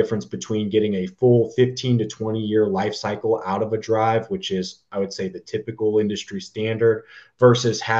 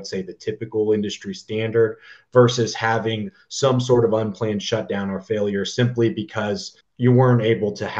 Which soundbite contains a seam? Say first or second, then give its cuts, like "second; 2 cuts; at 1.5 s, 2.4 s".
second; 1 cut; at 6.8 s